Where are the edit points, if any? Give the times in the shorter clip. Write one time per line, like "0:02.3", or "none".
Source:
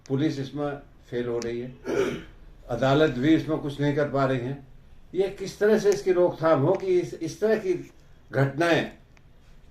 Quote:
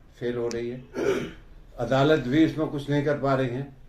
none